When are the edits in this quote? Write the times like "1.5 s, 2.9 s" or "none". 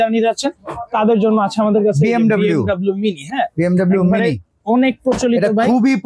none